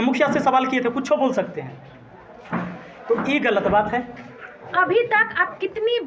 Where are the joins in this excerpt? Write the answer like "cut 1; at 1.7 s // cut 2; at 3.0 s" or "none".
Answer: cut 1; at 4.6 s